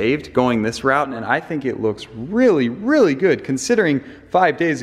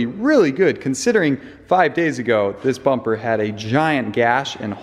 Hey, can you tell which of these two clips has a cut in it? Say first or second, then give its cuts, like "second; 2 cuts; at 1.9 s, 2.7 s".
first; 1 cut; at 1.1 s